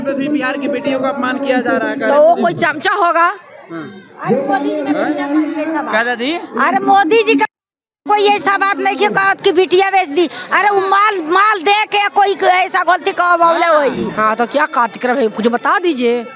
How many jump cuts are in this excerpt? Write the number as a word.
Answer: one